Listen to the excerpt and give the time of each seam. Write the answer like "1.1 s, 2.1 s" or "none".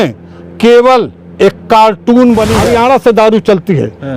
2.7 s